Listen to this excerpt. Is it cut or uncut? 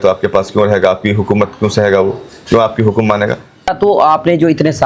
cut